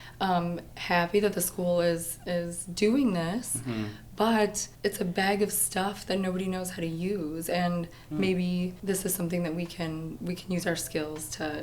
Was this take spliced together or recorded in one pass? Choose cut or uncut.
cut